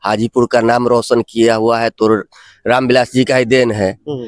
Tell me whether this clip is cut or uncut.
uncut